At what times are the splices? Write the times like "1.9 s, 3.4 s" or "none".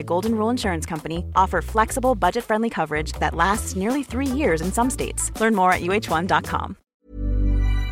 6.8 s